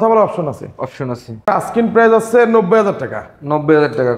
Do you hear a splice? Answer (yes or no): yes